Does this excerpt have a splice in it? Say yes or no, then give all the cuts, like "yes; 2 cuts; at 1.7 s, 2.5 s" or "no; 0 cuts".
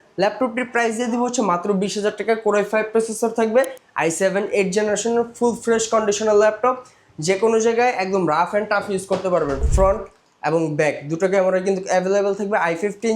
yes; 2 cuts; at 3.8 s, 9.7 s